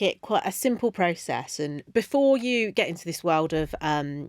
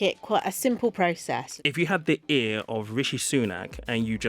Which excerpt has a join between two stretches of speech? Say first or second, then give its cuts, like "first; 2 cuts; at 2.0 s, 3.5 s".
second; 1 cut; at 1.5 s